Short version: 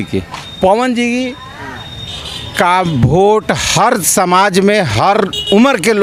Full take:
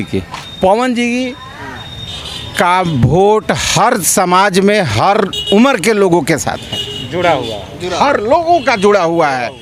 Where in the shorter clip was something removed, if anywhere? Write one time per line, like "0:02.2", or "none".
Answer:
none